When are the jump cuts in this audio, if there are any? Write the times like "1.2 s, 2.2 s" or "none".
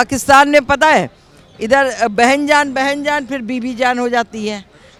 none